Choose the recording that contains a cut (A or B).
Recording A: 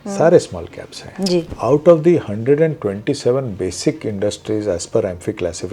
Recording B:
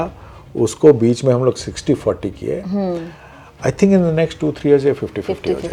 A